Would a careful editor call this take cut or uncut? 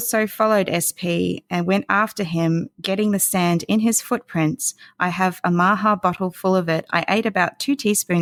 uncut